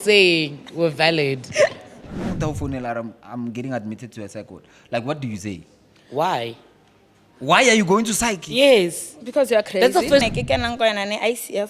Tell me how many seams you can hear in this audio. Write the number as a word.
two